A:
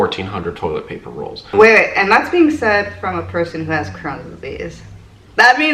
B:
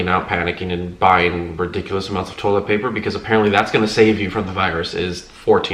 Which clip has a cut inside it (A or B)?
A